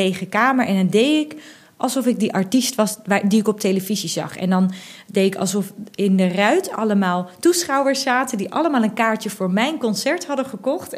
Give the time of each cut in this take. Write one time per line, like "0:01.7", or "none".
none